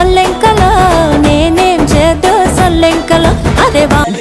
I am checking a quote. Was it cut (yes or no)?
no